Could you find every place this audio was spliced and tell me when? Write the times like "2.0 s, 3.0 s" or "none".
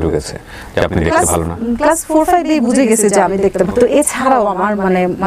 3.7 s

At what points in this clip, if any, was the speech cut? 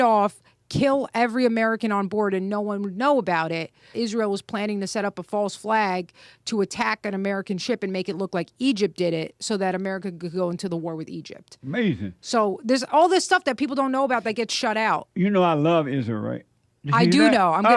3.9 s, 15.1 s

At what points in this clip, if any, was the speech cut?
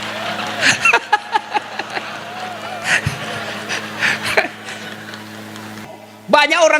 5.9 s

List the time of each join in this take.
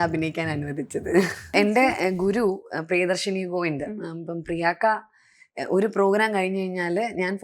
1.5 s

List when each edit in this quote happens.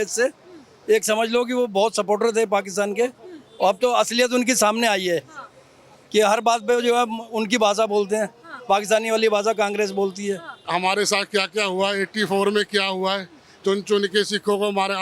10.6 s

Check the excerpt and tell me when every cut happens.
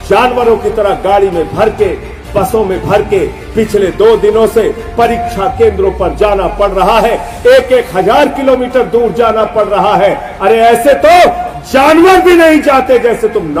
none

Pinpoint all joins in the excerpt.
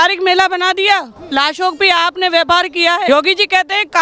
3.1 s

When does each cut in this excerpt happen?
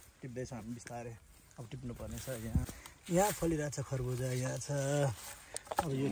2.6 s

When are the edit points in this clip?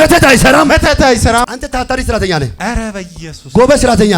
1.4 s

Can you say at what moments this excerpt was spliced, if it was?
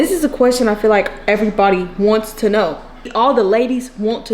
3.0 s

